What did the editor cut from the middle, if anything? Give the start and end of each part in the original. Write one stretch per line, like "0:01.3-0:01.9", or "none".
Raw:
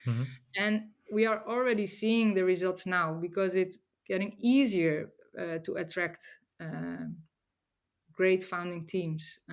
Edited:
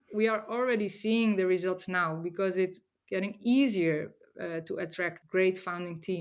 0:06.2-0:08.1